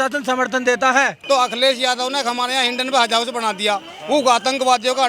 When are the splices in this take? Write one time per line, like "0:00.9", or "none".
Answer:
0:01.2